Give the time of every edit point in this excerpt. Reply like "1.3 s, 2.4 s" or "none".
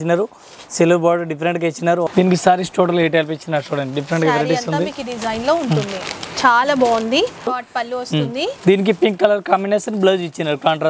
2.1 s, 7.5 s